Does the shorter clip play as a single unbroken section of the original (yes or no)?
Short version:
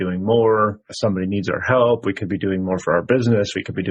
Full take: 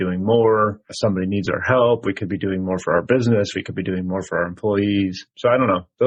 yes